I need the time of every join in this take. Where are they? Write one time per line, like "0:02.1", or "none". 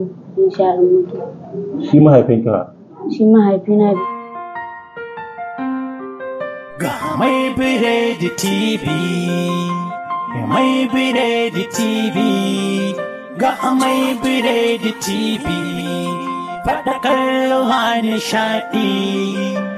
0:04.0